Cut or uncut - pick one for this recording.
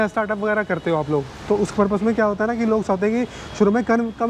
uncut